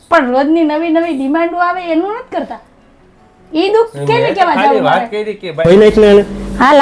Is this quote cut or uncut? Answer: cut